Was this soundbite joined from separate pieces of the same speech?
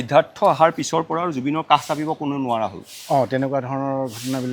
no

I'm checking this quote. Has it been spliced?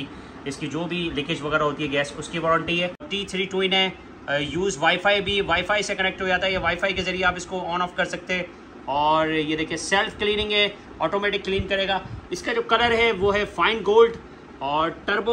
yes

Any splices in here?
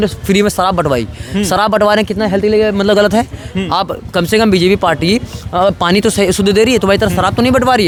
no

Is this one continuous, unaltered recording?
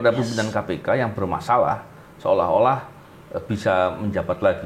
yes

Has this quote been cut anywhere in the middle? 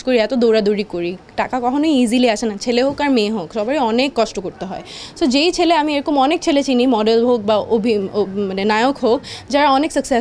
no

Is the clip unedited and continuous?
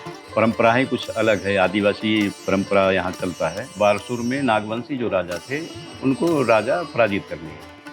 no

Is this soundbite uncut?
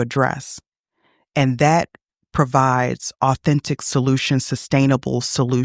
yes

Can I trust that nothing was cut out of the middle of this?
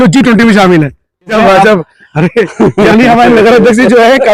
no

